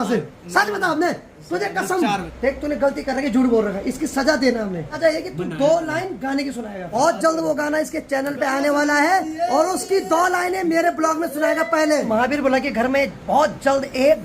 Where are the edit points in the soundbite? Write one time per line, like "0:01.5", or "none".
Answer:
0:02.3
0:05.0
0:07.0
0:12.1